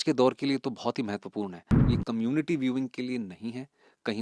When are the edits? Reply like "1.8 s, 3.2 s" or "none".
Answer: 1.7 s